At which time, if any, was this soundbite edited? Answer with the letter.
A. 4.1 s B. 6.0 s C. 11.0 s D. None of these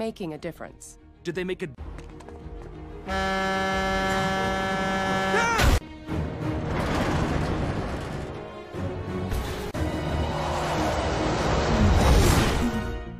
B